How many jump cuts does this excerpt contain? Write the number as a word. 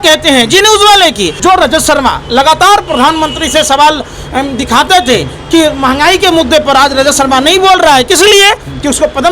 one